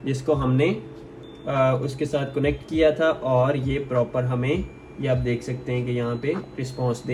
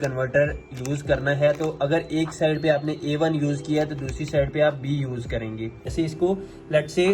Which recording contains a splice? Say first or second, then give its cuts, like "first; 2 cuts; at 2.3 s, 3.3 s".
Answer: second; 1 cut; at 5.9 s